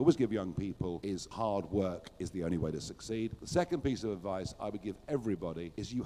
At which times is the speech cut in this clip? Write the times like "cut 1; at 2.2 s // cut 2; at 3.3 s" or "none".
cut 1; at 1.3 s // cut 2; at 3.4 s